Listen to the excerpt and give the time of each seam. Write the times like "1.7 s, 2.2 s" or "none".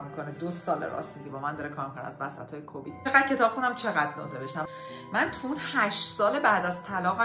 3.1 s, 4.7 s

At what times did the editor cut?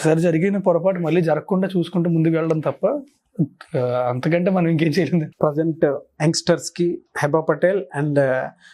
5.3 s

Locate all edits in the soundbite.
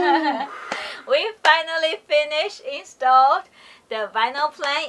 none

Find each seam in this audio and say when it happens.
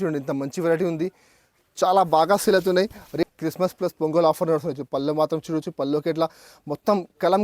3.2 s

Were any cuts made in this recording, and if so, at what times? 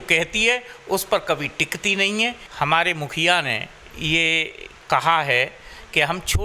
2.4 s

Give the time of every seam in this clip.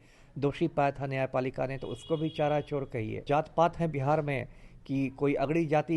3.2 s

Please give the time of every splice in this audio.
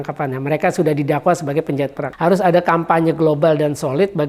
2.0 s

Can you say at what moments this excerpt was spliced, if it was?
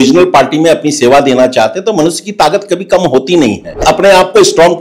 3.8 s

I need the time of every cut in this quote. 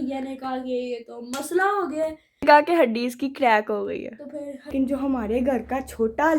2.4 s, 4.7 s

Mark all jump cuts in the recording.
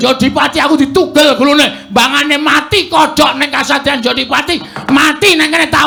none

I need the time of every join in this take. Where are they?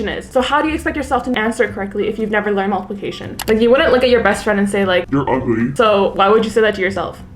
3.4 s

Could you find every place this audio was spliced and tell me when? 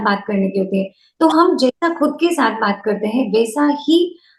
none

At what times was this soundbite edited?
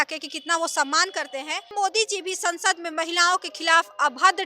1.7 s

